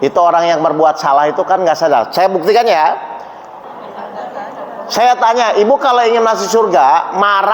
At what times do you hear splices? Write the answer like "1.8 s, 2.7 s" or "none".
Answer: 3.5 s

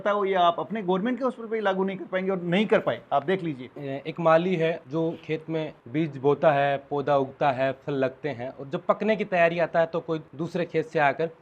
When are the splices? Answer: 3.8 s, 4.8 s, 5.8 s, 10.3 s

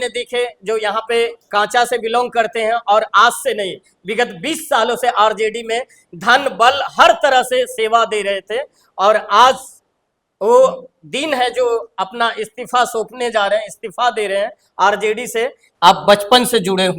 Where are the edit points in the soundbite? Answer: 15.6 s

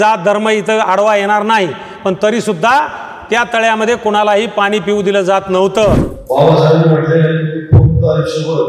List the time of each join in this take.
6.1 s

